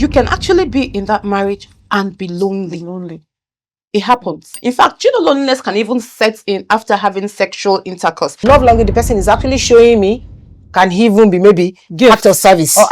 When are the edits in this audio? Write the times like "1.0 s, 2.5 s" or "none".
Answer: 4.5 s, 8.4 s

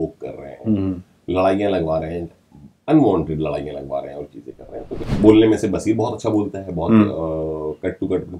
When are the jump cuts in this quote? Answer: 5.0 s

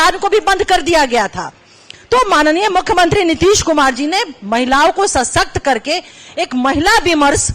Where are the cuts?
none

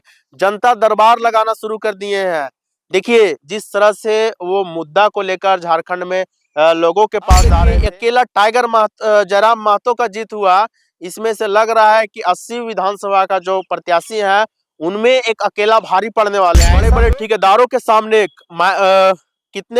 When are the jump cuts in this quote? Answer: 7.6 s, 16.9 s

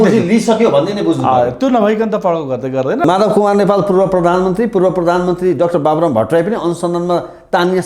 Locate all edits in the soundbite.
3.0 s

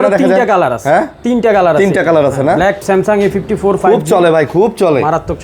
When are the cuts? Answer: 2.8 s

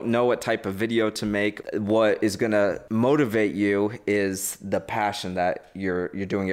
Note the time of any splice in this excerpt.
1.6 s, 2.8 s

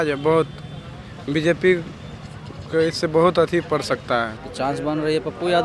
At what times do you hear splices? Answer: 4.4 s

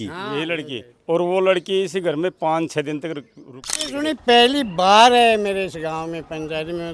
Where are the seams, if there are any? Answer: 3.9 s

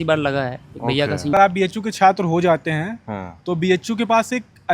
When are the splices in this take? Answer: 1.3 s

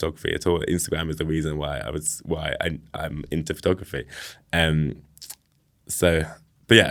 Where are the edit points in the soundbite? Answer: none

